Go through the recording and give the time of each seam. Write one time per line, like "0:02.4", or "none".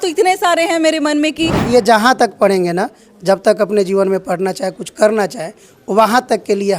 0:01.6